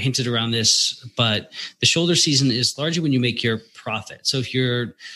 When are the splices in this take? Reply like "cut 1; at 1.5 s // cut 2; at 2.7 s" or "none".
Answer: none

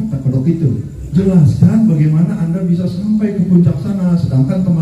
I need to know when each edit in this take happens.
cut 1; at 0.9 s

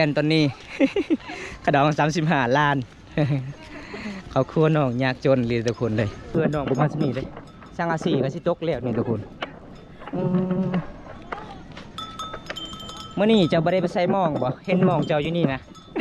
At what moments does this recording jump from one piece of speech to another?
cut 1; at 6.3 s

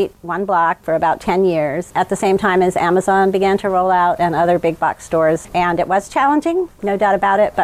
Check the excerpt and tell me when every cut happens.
cut 1; at 0.8 s // cut 2; at 1.9 s // cut 3; at 5.5 s // cut 4; at 6.7 s

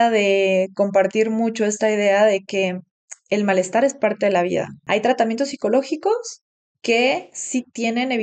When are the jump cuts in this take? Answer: cut 1; at 4.8 s

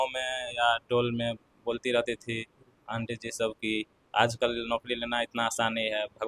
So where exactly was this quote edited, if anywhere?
none

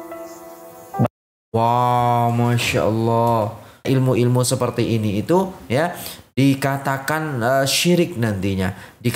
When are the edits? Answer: cut 1; at 3.8 s

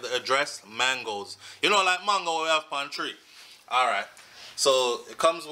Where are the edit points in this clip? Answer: none

